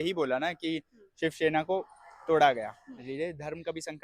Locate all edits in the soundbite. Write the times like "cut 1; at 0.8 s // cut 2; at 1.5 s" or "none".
cut 1; at 3.0 s